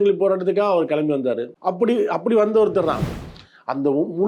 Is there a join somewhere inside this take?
yes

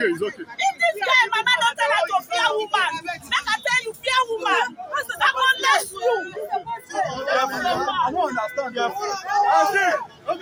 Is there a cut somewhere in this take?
no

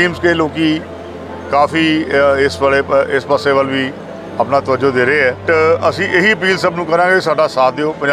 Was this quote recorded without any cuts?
no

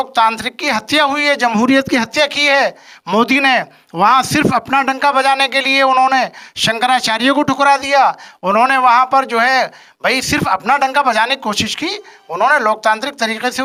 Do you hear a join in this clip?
no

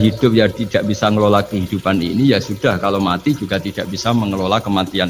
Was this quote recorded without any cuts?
yes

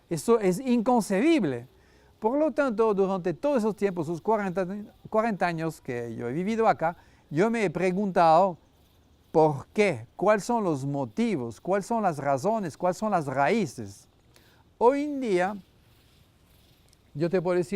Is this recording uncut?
no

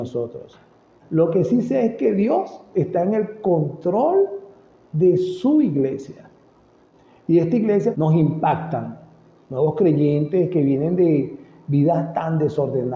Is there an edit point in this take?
yes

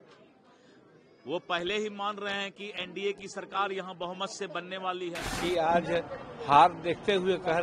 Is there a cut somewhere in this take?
yes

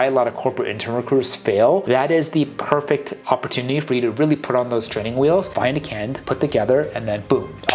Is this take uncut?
no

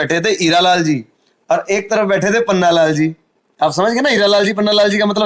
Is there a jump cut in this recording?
no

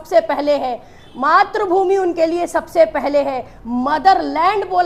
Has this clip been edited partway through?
no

